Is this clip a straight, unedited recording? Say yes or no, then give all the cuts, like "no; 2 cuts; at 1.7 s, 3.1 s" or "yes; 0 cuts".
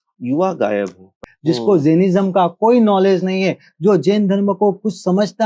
no; 1 cut; at 1.3 s